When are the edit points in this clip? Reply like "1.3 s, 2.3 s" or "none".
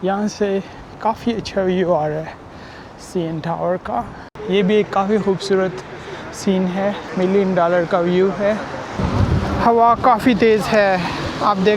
4.3 s, 7.0 s, 9.0 s